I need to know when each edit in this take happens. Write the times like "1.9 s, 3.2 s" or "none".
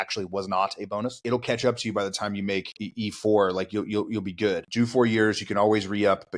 1.2 s, 2.8 s, 4.7 s